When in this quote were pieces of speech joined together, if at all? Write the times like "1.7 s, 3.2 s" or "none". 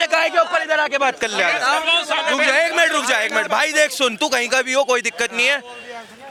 none